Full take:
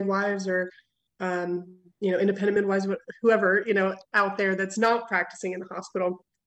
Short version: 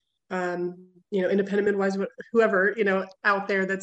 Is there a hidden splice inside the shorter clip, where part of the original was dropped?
no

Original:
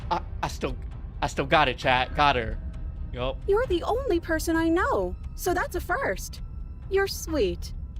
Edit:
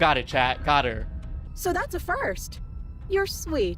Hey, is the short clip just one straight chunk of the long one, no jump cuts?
no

